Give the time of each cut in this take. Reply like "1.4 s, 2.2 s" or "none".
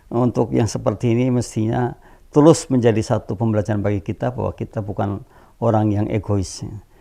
none